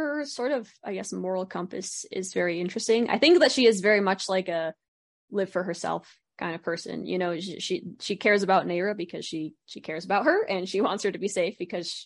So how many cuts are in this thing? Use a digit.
0